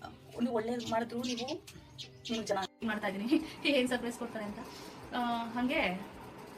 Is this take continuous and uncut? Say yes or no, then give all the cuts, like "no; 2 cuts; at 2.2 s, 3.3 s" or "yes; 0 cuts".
no; 1 cut; at 2.8 s